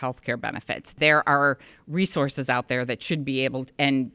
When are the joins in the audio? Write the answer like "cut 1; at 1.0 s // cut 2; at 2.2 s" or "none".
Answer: cut 1; at 0.9 s